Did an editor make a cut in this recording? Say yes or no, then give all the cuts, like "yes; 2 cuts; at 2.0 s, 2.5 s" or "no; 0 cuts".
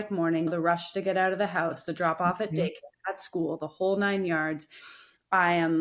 no; 0 cuts